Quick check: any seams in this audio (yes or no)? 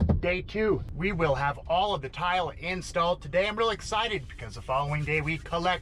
yes